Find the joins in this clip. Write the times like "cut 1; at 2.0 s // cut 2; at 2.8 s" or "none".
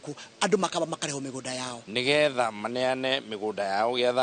cut 1; at 1.7 s